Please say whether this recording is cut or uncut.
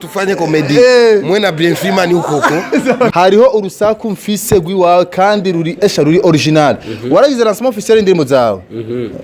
cut